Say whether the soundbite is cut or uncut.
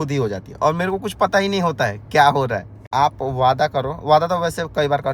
cut